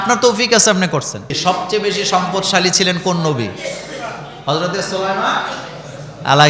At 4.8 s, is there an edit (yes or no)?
no